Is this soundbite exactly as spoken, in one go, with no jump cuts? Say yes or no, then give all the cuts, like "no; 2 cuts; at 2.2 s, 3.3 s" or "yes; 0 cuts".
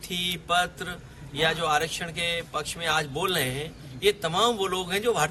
yes; 0 cuts